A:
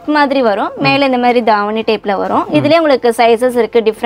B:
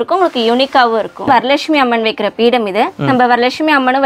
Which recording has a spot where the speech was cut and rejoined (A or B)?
B